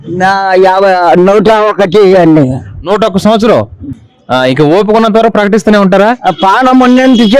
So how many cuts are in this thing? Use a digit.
0